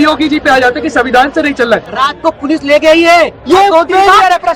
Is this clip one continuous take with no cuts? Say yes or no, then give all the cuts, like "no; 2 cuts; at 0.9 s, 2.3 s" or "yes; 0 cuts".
no; 1 cut; at 1.9 s